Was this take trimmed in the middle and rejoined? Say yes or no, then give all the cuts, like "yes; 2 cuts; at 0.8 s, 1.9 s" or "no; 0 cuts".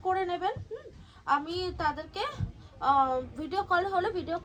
no; 0 cuts